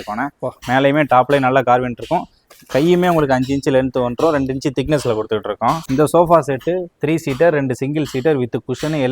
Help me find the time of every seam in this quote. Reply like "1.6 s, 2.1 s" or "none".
5.8 s